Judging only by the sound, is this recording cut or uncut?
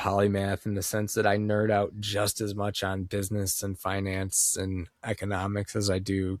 uncut